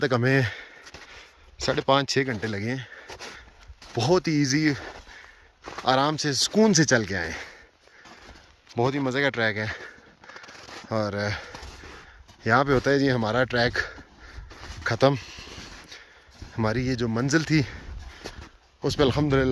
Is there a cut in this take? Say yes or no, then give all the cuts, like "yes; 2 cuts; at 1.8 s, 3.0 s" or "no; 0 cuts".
no; 0 cuts